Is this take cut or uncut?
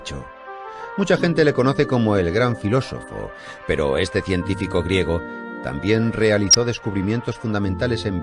uncut